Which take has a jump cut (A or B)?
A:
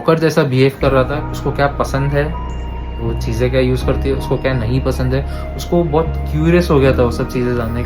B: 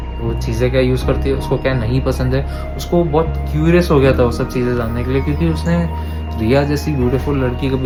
A